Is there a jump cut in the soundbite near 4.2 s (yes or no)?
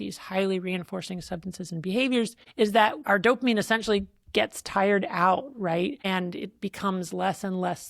no